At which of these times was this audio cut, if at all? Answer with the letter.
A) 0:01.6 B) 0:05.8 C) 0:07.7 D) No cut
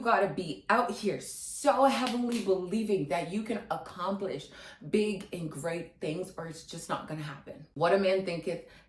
C